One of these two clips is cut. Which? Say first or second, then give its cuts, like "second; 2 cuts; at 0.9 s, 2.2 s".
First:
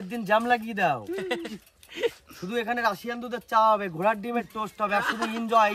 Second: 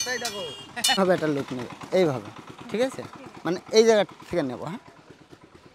second; 1 cut; at 1.0 s